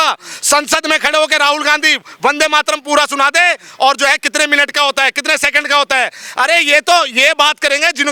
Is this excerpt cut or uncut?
uncut